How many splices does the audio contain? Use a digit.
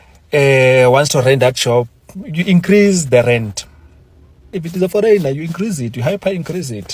1